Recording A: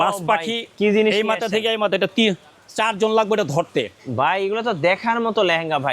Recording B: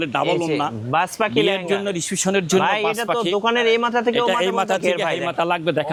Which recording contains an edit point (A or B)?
A